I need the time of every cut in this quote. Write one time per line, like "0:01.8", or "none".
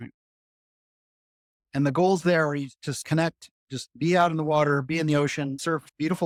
none